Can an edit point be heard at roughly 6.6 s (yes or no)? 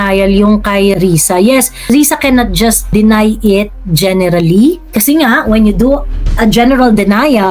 no